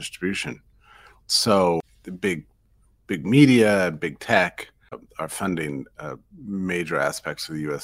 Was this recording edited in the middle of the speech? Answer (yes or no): yes